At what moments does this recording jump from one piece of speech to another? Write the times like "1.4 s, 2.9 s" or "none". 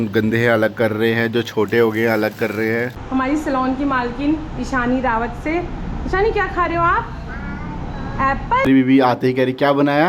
3.0 s, 8.7 s